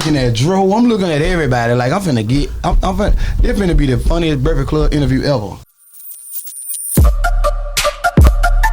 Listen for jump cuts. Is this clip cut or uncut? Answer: cut